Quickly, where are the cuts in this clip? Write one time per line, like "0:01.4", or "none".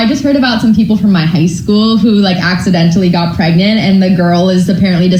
none